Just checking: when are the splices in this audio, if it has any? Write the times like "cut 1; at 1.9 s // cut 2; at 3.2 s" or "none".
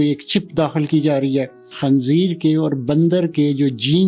cut 1; at 1.7 s